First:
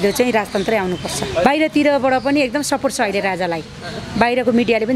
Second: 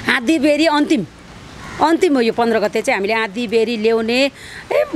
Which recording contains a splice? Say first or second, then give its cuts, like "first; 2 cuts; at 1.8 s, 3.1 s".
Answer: first; 1 cut; at 1.4 s